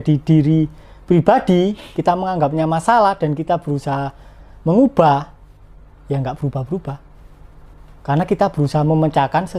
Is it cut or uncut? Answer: uncut